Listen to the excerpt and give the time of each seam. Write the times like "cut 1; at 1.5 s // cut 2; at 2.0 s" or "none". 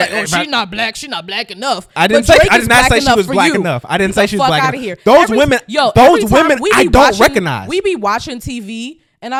none